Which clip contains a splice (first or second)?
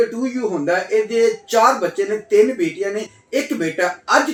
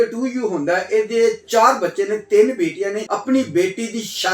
second